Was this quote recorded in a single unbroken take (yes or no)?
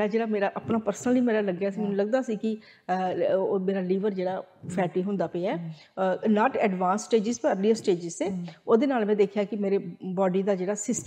yes